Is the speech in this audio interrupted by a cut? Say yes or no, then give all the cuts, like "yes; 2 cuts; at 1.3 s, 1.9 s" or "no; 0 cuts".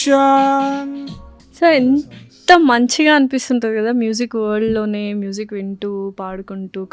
no; 0 cuts